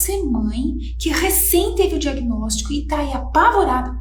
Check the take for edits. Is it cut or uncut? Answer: uncut